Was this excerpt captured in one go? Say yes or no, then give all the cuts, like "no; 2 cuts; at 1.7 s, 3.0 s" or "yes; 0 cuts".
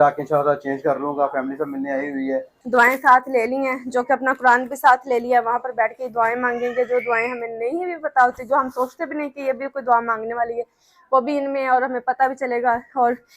no; 1 cut; at 2.6 s